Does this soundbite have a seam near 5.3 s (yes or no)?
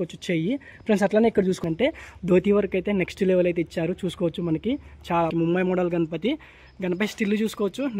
yes